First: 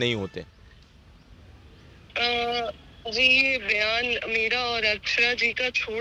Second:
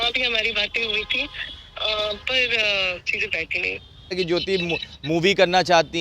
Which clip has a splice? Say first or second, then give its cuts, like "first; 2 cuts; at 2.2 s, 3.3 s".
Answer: second; 1 cut; at 4.1 s